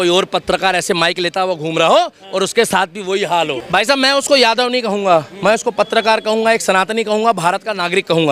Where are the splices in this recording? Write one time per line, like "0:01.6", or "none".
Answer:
0:03.6